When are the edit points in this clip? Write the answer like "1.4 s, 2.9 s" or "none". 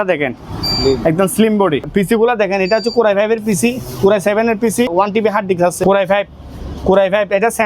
1.9 s, 4.9 s, 5.8 s

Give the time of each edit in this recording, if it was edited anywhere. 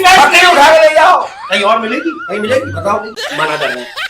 3.2 s

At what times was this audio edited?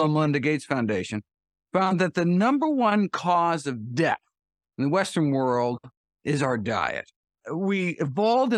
7.3 s

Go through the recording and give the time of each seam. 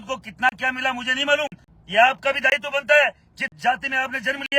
1.6 s

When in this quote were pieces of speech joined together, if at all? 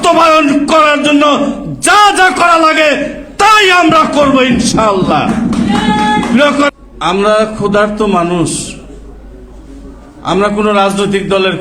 6.7 s

